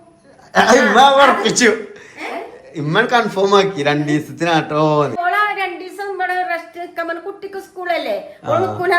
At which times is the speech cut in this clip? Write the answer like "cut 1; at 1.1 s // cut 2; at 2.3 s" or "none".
cut 1; at 5.2 s